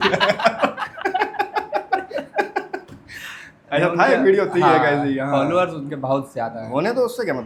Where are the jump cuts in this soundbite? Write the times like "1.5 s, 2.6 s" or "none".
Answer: none